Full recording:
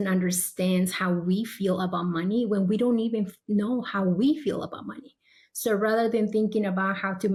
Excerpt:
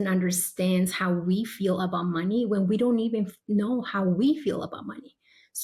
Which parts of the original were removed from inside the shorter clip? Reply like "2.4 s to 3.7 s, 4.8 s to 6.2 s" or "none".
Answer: none